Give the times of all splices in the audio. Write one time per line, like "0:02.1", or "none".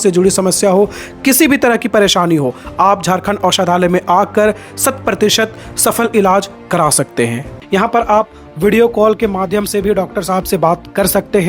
0:07.5